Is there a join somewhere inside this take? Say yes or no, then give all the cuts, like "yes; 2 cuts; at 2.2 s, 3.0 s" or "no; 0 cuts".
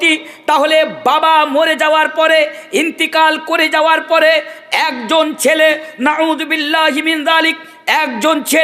no; 0 cuts